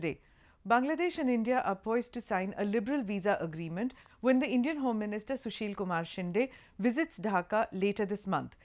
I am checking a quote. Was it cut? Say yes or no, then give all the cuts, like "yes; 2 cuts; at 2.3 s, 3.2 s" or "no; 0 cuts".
no; 0 cuts